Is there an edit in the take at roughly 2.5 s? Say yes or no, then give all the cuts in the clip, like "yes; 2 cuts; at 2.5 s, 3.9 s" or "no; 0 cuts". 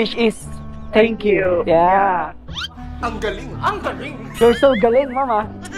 no; 1 cut; at 4.2 s